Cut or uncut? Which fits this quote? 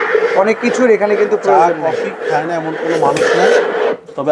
uncut